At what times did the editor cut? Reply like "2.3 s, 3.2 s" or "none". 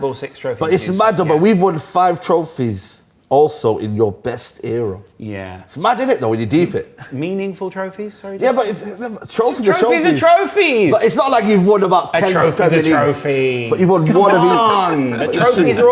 7.1 s